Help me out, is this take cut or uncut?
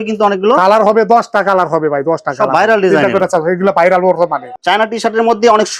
cut